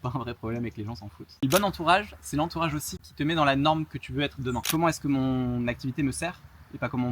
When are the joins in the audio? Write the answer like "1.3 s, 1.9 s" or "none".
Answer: 1.4 s, 3.1 s, 4.6 s